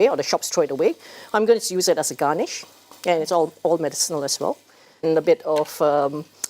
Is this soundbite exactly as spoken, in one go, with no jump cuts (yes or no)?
no